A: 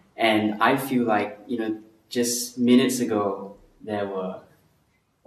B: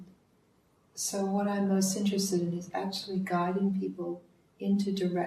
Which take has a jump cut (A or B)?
B